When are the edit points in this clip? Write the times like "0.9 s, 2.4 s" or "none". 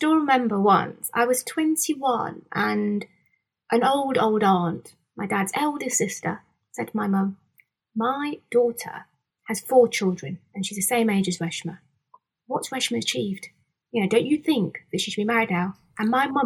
none